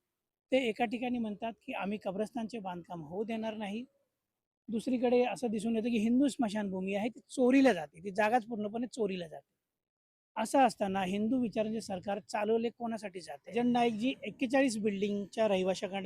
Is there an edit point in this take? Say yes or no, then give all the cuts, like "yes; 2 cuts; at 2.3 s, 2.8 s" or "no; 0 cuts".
yes; 1 cut; at 13.5 s